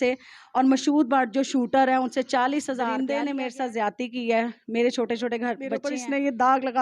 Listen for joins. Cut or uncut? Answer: cut